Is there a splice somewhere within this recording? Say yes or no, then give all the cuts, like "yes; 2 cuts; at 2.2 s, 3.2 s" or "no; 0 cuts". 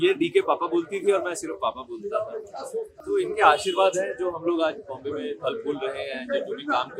no; 0 cuts